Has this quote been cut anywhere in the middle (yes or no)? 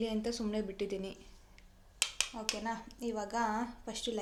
no